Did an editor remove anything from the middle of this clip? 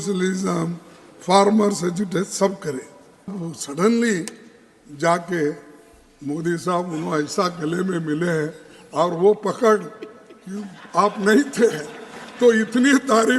yes; 1 cut; at 3.3 s

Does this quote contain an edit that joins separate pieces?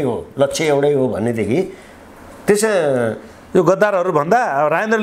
no; 0 cuts

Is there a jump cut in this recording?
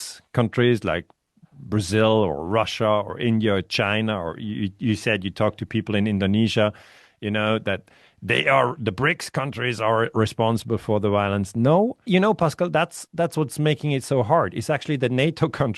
yes; 1 cut; at 12.0 s

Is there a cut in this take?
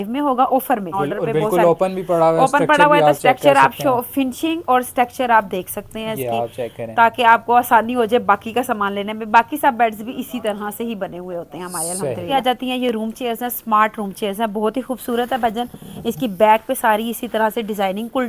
yes; 2 cuts; at 0.9 s, 12.4 s

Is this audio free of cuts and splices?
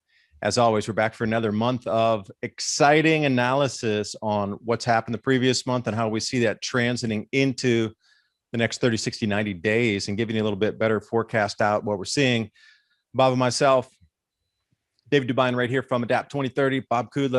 yes; 0 cuts

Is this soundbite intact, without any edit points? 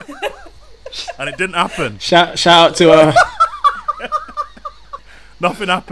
yes; 0 cuts

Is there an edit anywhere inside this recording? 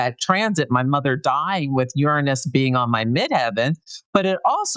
no; 0 cuts

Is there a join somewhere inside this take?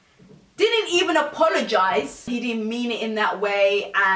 yes; 1 cut; at 2.2 s

